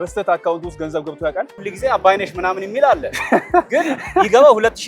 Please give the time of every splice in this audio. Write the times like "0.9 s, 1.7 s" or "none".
1.6 s